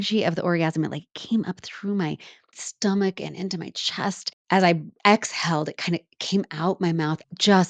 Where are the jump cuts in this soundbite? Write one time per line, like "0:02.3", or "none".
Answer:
none